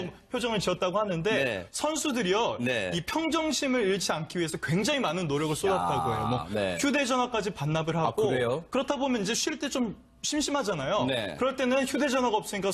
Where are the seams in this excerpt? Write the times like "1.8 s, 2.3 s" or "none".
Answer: 2.8 s